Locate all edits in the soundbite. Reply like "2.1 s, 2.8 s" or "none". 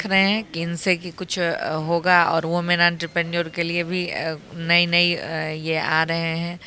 none